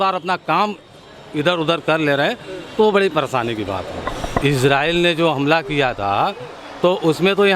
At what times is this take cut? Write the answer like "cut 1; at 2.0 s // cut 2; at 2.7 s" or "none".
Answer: cut 1; at 4.4 s